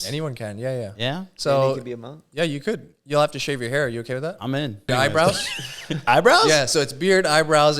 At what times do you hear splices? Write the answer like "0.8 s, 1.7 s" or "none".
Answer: 4.9 s